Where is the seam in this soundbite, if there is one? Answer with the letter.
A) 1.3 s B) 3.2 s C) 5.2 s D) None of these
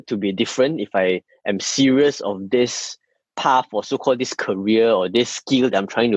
D